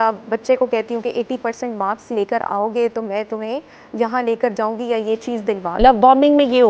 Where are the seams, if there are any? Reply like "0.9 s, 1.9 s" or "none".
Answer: 5.8 s